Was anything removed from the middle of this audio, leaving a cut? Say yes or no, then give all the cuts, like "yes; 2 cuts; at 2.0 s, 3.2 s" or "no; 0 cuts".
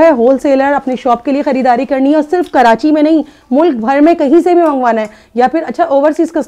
no; 0 cuts